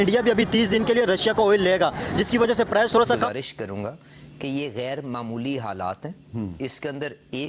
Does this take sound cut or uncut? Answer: cut